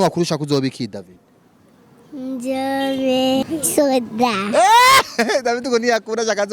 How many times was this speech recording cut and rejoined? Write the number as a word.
one